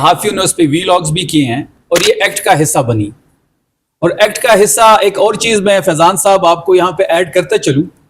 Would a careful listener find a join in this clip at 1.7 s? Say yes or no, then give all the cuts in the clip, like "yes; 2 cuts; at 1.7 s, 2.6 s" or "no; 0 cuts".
yes; 1 cut; at 1.7 s